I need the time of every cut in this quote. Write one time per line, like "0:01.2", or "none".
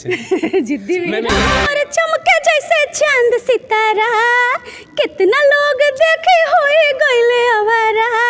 0:01.5

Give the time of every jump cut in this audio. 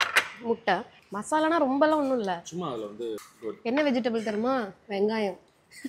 0:01.0

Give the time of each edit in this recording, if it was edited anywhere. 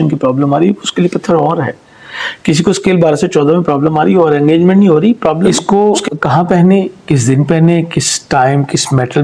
0:05.5

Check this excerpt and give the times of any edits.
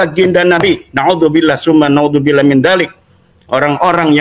none

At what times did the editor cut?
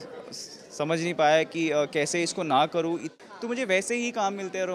0:03.1

